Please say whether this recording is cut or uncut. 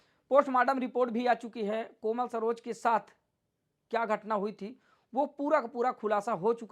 uncut